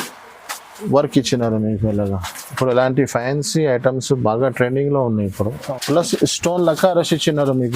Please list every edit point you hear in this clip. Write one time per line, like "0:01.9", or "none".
0:05.6